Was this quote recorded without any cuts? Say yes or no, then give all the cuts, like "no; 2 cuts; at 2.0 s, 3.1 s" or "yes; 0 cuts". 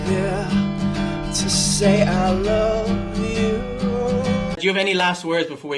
no; 1 cut; at 4.5 s